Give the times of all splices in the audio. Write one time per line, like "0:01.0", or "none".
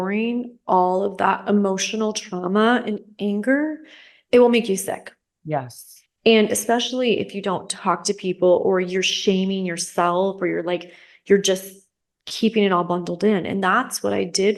none